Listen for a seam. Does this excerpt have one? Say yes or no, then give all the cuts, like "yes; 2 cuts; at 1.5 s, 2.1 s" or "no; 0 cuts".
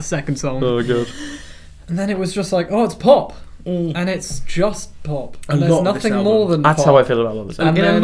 no; 0 cuts